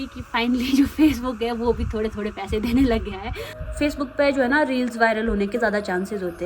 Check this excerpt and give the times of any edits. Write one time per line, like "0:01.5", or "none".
0:03.6